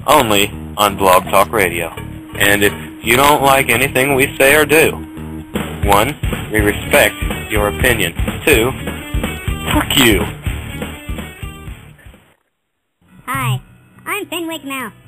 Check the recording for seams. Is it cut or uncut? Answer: cut